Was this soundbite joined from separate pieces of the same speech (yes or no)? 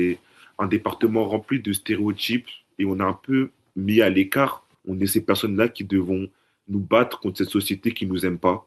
no